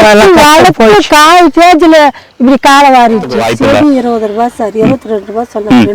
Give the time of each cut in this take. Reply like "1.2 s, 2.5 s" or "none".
3.4 s